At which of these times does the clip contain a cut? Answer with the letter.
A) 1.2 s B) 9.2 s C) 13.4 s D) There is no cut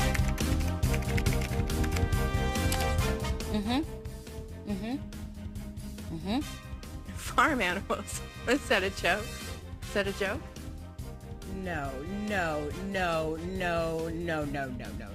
A